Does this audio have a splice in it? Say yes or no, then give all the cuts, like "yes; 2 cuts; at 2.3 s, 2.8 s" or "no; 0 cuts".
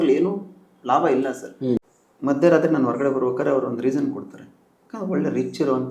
yes; 1 cut; at 1.8 s